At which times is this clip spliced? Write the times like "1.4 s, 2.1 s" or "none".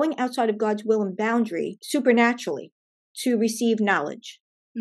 1.8 s